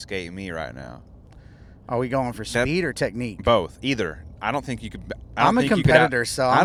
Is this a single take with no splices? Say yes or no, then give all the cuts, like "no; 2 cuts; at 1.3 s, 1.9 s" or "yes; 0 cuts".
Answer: yes; 0 cuts